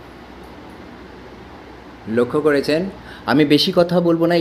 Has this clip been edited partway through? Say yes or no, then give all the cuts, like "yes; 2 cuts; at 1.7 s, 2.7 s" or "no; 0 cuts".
no; 0 cuts